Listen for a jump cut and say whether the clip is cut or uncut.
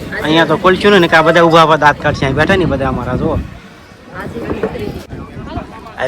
cut